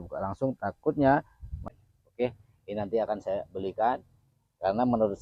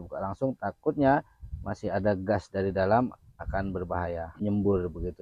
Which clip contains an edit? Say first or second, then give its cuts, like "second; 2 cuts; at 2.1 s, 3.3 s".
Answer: first; 1 cut; at 1.7 s